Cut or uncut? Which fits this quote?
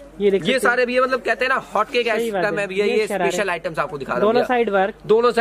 uncut